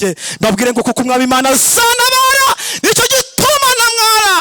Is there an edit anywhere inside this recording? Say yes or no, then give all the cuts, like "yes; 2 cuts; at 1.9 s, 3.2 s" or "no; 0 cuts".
no; 0 cuts